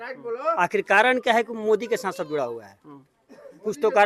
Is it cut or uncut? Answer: uncut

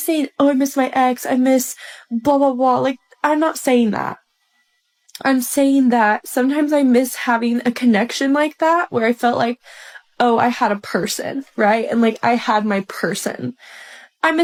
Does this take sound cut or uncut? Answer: uncut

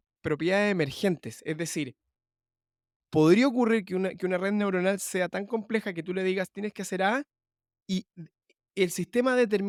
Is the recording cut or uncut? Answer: uncut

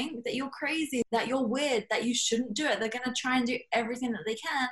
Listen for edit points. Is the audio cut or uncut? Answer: cut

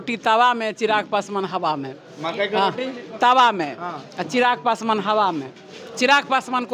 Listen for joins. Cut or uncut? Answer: uncut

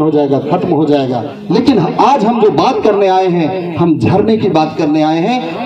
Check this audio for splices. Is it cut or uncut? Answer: cut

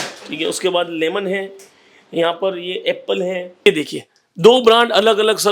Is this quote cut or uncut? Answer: cut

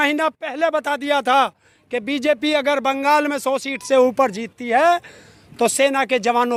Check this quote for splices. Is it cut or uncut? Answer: uncut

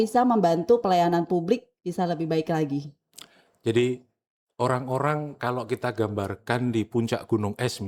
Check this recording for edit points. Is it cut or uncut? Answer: uncut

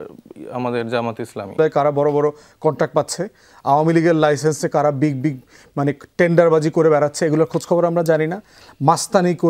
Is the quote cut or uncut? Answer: cut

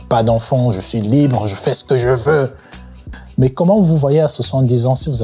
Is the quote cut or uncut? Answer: cut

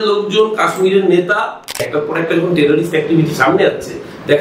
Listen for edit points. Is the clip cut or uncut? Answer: cut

